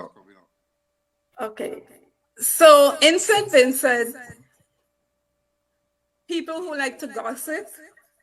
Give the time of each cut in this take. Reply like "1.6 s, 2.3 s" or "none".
none

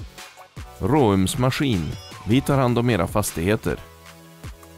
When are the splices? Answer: 3.8 s

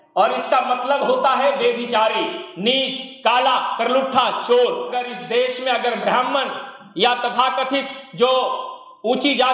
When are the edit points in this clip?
4.9 s

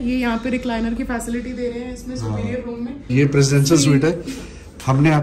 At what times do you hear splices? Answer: 3.0 s

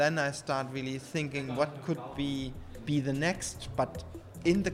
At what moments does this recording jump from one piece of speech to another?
none

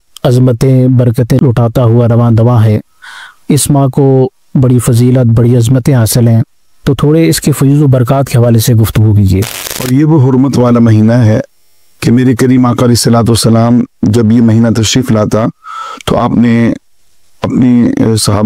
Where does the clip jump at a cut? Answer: 1.4 s, 9.9 s

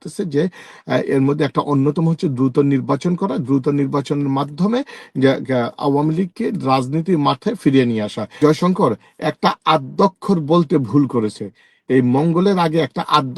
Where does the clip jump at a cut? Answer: 8.3 s

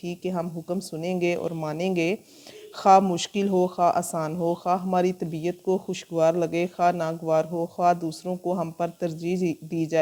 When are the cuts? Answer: none

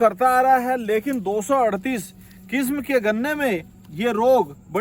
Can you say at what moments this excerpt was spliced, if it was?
none

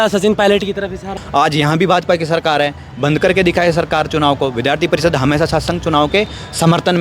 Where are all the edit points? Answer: 1.2 s

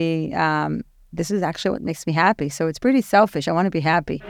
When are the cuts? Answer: none

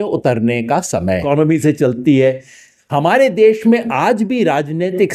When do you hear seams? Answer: 1.2 s

